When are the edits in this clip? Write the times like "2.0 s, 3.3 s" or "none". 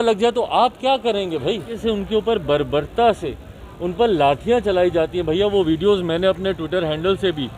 1.7 s